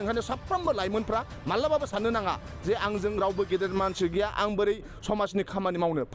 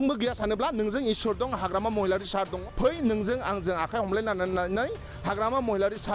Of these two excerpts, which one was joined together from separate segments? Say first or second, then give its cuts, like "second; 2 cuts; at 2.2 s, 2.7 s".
second; 1 cut; at 2.6 s